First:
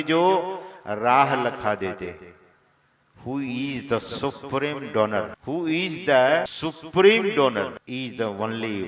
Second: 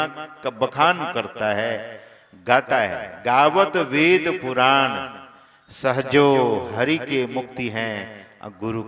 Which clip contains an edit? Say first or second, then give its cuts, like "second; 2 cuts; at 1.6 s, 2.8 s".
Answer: first; 3 cuts; at 5.4 s, 6.5 s, 7.8 s